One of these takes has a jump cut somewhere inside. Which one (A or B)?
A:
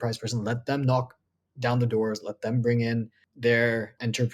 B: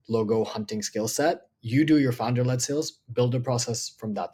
A